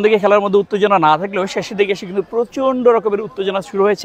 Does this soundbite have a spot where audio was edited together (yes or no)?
no